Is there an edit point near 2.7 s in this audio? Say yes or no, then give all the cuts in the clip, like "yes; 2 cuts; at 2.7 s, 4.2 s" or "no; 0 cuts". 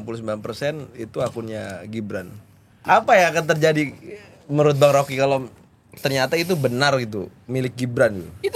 yes; 1 cut; at 2.7 s